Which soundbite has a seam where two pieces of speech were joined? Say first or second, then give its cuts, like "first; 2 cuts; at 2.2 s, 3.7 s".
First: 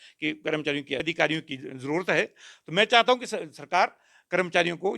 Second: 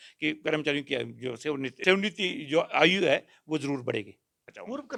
first; 1 cut; at 1.0 s